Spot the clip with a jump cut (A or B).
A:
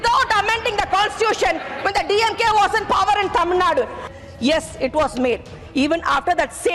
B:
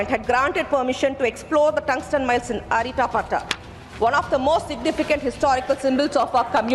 A